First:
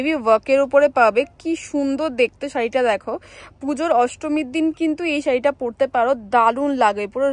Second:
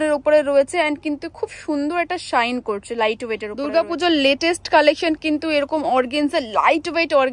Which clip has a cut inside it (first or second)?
second